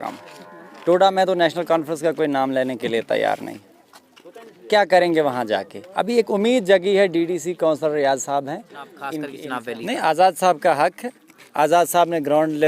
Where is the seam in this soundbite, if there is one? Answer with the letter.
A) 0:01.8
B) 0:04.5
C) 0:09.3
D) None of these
C